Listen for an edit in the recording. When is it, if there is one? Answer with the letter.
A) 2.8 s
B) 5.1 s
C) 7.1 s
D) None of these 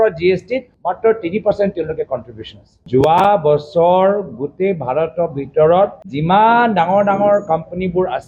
A